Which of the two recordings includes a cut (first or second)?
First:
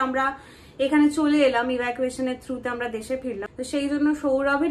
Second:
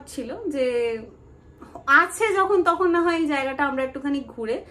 first